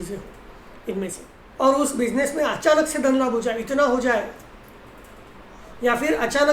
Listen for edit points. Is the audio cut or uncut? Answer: cut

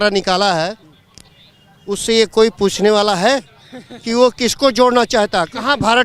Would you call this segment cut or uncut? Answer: uncut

